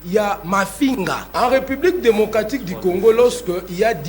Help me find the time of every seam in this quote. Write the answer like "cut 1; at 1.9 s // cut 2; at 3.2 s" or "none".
cut 1; at 1.2 s